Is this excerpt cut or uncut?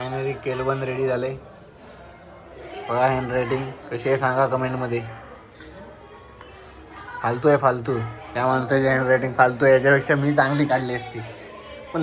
uncut